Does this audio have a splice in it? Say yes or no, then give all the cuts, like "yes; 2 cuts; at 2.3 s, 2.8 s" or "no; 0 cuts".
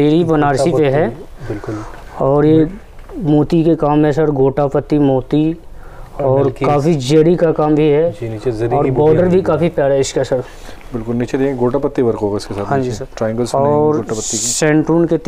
no; 0 cuts